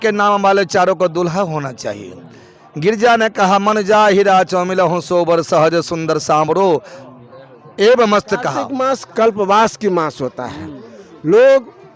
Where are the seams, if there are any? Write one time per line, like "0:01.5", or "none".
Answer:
0:08.6

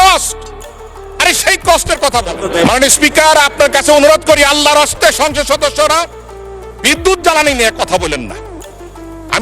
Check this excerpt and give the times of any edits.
0:02.4

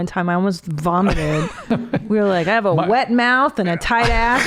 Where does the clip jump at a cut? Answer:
none

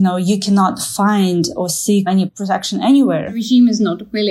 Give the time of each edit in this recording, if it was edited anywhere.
0:02.3
0:03.4

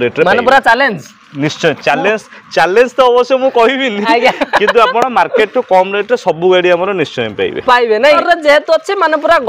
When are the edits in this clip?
0:08.2

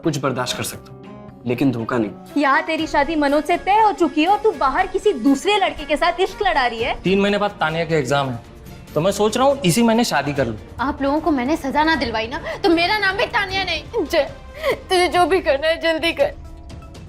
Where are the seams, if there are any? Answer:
0:02.2
0:07.0
0:10.7
0:13.8

